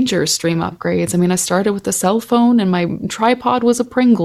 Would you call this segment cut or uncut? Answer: uncut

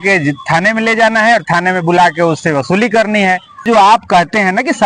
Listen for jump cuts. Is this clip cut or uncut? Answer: cut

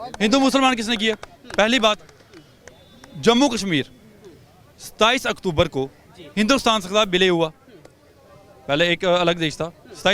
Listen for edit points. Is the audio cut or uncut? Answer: uncut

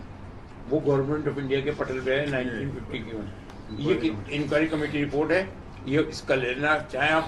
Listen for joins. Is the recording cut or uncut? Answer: uncut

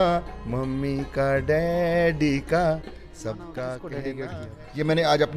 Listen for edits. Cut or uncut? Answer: cut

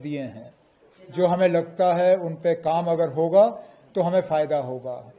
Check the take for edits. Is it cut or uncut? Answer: uncut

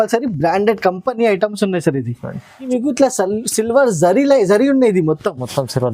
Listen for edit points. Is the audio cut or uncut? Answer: cut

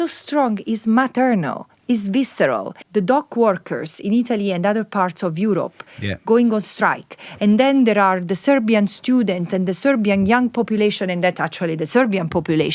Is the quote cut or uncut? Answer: cut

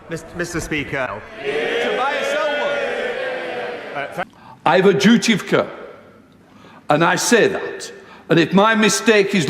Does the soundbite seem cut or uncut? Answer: cut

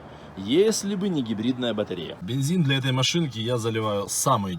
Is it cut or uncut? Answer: cut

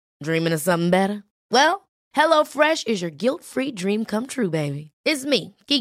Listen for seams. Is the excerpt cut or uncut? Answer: uncut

